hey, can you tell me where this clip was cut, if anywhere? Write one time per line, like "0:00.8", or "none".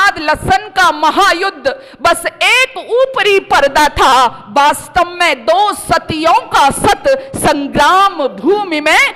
none